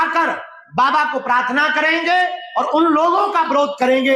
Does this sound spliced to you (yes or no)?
no